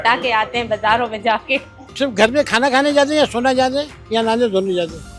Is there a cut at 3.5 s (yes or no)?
no